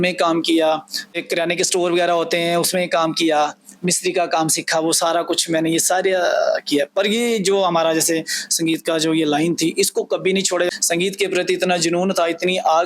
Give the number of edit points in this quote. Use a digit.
2